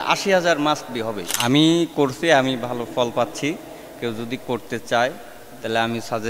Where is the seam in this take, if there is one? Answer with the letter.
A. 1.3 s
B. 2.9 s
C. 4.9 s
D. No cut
A